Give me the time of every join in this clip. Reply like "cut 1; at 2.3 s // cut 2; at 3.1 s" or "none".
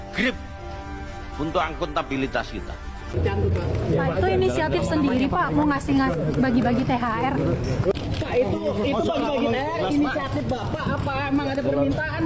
cut 1; at 3.1 s